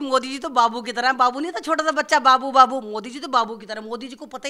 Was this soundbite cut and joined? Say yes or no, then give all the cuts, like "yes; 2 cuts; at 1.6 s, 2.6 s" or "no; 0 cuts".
no; 0 cuts